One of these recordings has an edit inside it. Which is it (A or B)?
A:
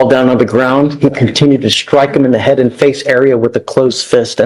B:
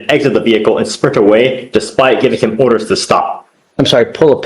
B